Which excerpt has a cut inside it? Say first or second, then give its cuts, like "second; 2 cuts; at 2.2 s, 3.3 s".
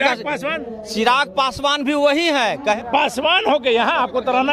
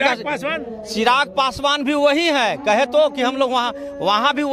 first; 1 cut; at 2.8 s